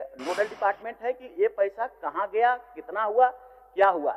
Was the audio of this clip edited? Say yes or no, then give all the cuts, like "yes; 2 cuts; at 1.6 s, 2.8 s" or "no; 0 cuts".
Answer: no; 0 cuts